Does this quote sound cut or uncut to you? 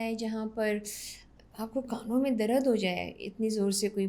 uncut